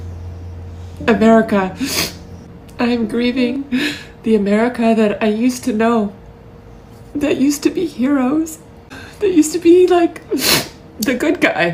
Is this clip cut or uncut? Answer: uncut